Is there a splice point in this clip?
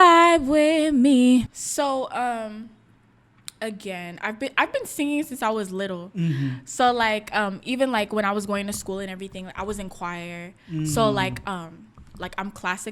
yes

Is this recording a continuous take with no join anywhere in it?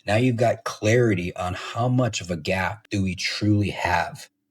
no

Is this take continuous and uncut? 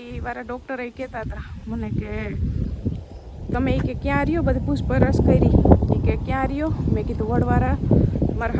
yes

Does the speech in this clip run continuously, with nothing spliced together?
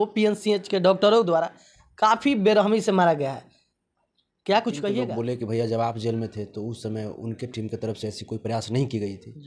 no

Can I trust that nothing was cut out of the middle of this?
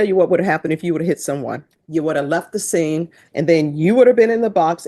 no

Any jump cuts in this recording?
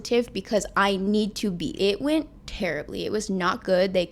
yes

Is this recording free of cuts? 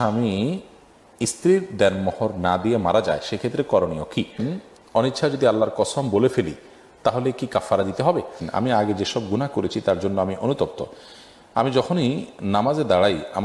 no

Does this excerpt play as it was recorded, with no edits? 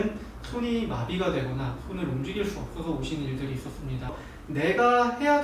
no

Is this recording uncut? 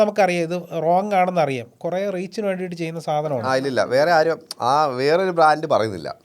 no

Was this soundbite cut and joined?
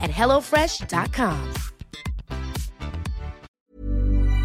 yes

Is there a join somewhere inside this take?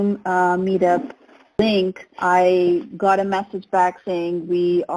yes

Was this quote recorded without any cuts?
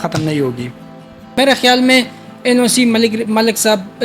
no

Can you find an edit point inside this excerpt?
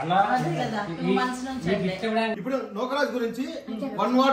yes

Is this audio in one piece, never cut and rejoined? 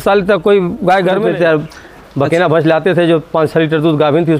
no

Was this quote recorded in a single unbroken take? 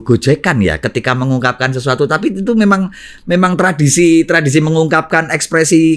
yes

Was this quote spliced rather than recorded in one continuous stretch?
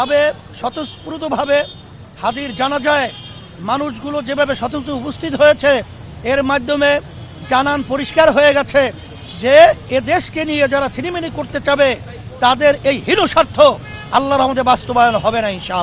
no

